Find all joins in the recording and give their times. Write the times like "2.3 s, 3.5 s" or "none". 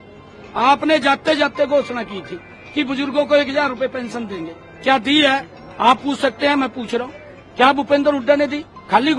none